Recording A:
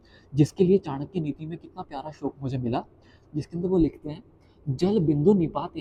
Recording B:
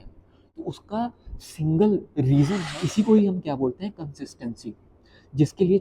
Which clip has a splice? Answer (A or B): B